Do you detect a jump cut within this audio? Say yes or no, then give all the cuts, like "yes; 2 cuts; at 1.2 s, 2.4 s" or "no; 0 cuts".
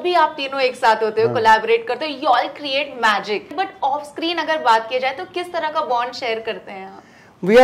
yes; 1 cut; at 3.5 s